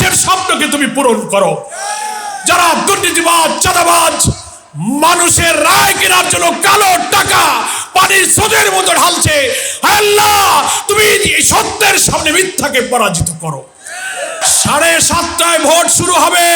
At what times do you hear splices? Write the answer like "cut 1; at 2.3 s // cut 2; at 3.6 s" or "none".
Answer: cut 1; at 14.4 s